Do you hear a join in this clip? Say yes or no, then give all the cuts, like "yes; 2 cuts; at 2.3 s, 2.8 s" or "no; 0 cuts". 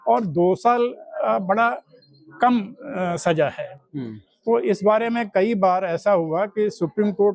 no; 0 cuts